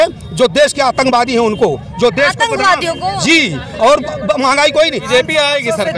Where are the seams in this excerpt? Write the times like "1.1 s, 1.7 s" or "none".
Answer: 5.1 s